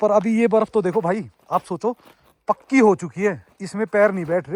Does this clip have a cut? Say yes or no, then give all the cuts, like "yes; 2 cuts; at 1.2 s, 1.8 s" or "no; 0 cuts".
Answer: no; 0 cuts